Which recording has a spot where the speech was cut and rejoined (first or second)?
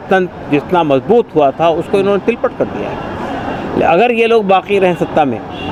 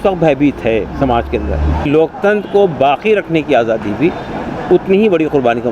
second